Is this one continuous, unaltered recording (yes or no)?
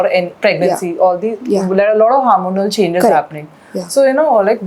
yes